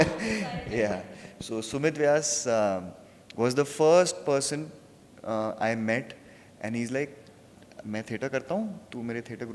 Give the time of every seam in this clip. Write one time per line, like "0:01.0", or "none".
none